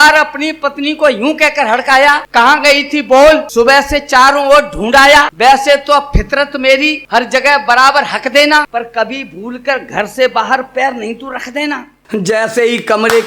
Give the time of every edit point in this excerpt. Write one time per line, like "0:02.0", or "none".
0:02.2
0:03.5
0:05.3
0:07.0
0:08.7
0:12.0